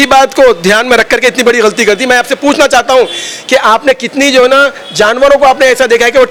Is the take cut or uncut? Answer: uncut